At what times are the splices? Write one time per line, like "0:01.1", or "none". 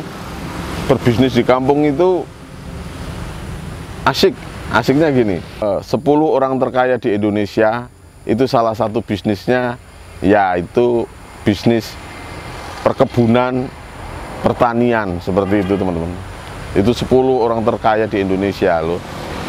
0:05.6